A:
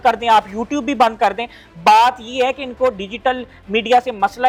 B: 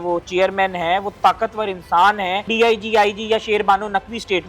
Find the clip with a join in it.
B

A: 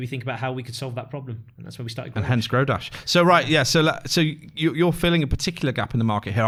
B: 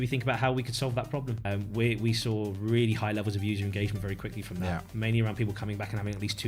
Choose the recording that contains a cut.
B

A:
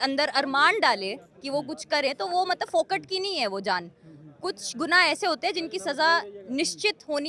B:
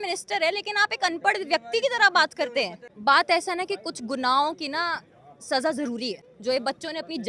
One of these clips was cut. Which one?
B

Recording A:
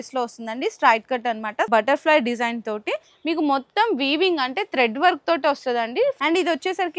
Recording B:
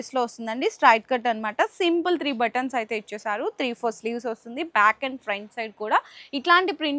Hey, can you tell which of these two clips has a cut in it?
A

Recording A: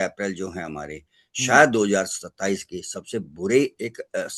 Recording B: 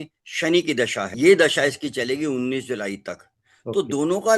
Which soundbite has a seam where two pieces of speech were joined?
B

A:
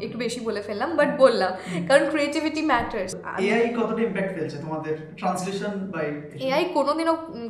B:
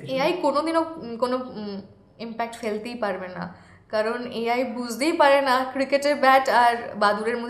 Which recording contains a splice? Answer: A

